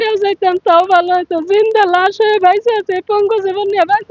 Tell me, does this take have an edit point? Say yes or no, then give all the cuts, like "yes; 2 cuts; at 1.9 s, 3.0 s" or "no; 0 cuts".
no; 0 cuts